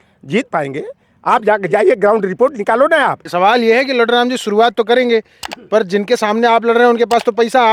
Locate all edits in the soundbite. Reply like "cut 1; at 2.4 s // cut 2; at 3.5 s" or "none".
cut 1; at 3.2 s